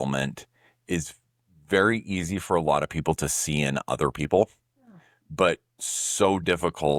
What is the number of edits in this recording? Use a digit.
0